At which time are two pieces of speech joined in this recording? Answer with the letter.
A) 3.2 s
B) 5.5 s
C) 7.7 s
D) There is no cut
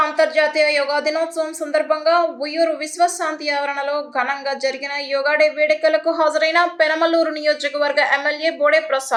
D